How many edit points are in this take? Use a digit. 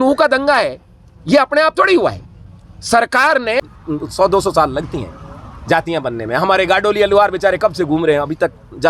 1